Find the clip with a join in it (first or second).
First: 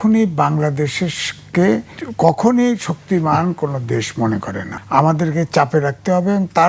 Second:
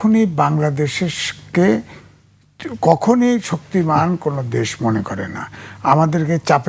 first